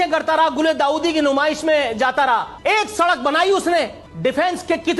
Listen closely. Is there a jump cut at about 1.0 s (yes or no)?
no